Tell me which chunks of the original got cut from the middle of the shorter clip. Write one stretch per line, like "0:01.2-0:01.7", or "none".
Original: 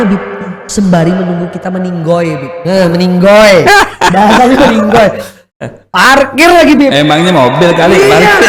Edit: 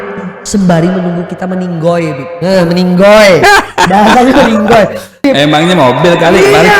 0:05.5-0:06.8